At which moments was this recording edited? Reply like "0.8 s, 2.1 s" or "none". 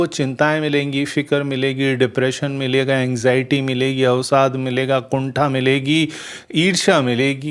none